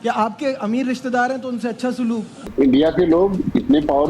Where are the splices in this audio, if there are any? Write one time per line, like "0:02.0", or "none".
0:02.5